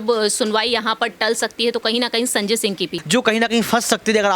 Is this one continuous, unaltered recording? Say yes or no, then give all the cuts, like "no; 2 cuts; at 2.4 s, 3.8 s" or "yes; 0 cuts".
no; 1 cut; at 2.9 s